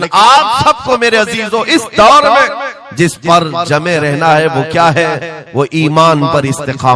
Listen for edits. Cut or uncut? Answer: uncut